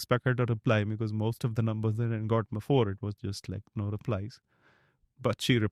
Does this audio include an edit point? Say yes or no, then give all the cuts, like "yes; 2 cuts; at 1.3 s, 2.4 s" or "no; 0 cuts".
no; 0 cuts